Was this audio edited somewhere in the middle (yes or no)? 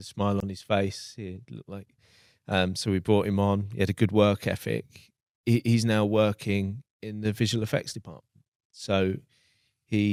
no